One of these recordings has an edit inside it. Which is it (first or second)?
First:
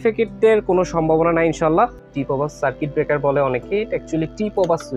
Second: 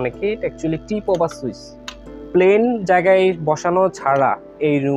first